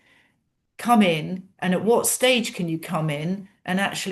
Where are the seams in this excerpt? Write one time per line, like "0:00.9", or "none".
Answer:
none